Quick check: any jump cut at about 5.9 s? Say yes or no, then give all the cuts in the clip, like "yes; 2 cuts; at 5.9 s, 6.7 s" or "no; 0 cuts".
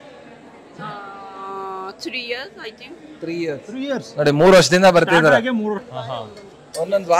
yes; 1 cut; at 5.9 s